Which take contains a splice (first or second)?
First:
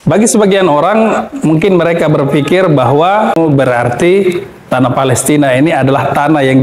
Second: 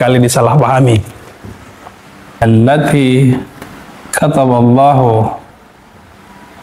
first